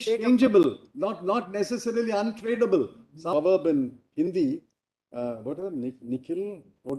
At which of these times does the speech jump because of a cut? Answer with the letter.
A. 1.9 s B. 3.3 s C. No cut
B